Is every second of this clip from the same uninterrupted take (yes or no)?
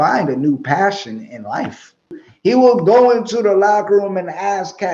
no